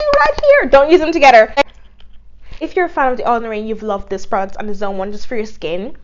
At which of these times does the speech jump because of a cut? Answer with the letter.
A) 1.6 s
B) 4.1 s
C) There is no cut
A